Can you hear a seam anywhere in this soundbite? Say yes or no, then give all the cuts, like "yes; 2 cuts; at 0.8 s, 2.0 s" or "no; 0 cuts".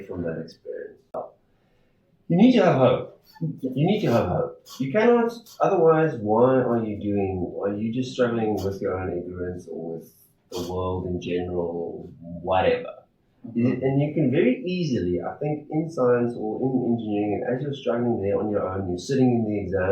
yes; 1 cut; at 1.2 s